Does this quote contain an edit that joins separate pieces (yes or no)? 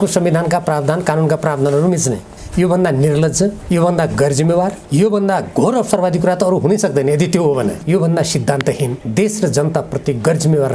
yes